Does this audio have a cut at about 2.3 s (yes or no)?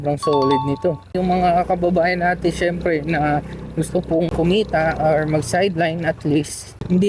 no